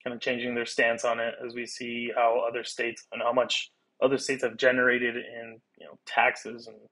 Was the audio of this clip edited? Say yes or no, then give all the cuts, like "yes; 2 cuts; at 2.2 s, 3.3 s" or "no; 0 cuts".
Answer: no; 0 cuts